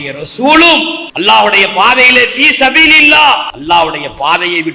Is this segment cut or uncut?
cut